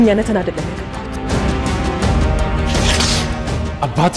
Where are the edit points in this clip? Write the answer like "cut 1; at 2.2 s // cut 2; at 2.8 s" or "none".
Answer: none